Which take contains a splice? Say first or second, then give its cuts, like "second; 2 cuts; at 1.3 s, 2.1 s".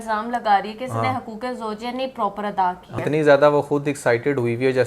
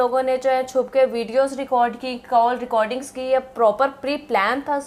first; 1 cut; at 3.0 s